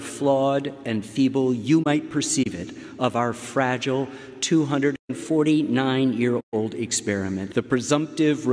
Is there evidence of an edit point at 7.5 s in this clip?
yes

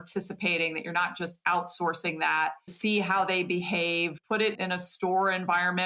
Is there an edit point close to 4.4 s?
yes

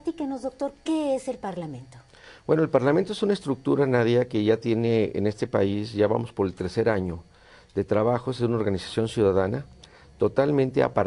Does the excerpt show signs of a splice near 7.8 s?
no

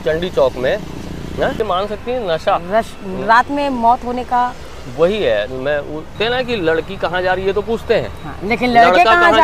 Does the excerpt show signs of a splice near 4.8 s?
no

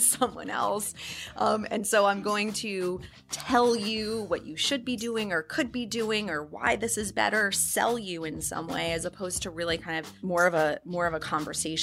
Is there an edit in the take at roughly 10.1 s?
yes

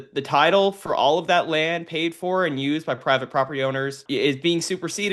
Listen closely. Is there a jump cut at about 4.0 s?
yes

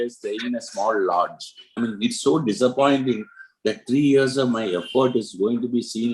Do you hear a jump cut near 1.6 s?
yes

